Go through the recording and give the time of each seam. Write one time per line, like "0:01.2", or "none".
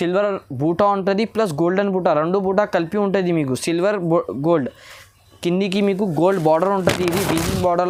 none